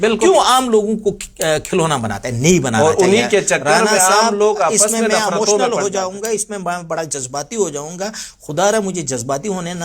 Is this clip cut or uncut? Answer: uncut